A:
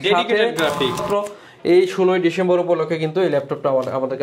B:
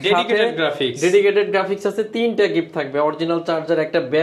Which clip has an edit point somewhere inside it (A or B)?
A